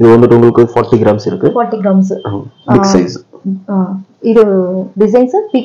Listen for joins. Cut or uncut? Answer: uncut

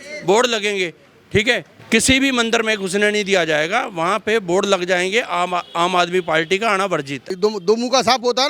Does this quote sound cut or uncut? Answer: cut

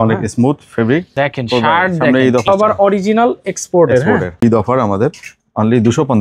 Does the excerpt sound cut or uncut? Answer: cut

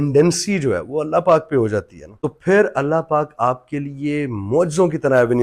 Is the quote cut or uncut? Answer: uncut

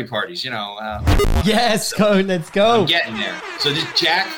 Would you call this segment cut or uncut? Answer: cut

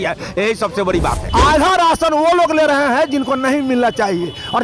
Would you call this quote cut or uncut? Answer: cut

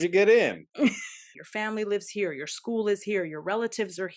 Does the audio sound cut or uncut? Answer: cut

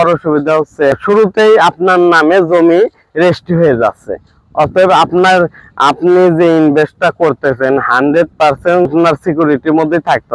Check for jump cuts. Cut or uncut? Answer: cut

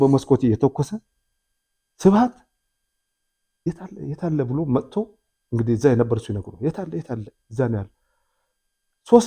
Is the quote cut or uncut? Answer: uncut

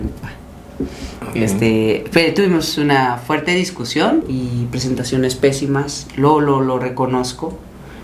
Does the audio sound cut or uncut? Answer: cut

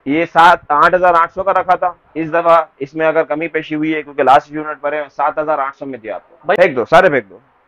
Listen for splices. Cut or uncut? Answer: cut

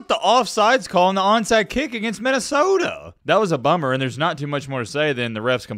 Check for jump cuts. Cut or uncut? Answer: uncut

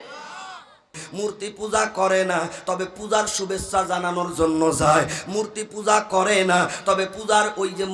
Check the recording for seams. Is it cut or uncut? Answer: cut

